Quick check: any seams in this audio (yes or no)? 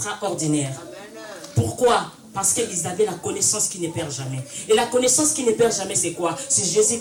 no